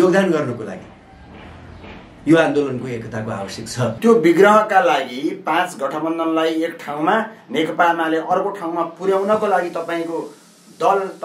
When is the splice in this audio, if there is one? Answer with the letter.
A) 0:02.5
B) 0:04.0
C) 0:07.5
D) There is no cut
B